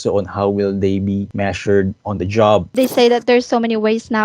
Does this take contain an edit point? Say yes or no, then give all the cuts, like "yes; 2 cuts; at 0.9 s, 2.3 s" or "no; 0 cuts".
yes; 2 cuts; at 1.3 s, 2.7 s